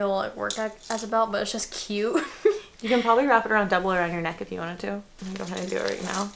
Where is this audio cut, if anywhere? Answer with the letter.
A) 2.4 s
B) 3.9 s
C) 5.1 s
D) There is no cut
C